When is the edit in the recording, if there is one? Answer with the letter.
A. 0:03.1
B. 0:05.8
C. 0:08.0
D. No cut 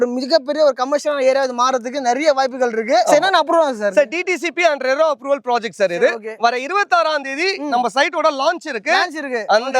A